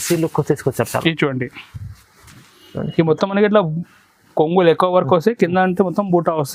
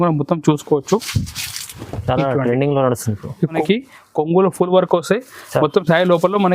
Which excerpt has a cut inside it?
second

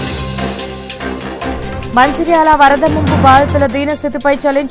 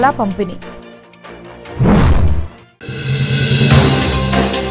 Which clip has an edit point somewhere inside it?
first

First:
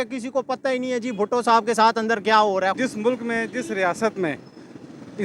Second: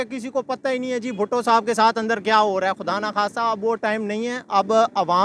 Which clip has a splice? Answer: first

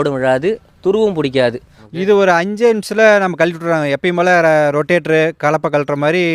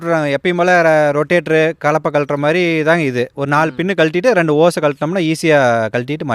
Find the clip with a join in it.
first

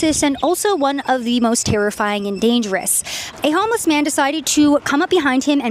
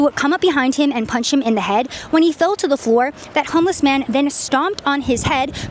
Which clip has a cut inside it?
first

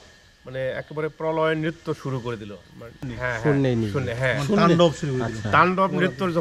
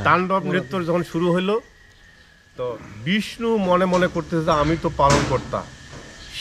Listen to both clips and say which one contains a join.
first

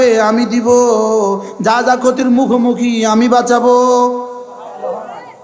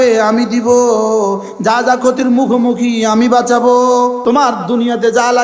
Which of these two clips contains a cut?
second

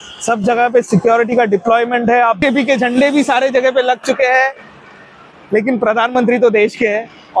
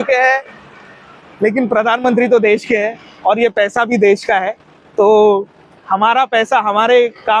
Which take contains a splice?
first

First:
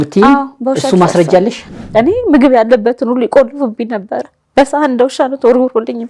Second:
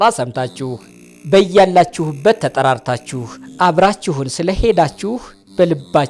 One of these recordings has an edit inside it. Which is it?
first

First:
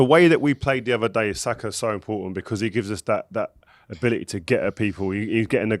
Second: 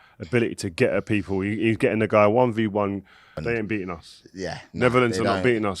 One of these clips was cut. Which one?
second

